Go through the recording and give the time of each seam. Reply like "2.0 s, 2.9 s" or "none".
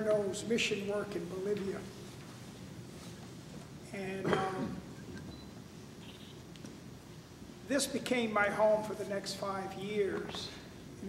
2.7 s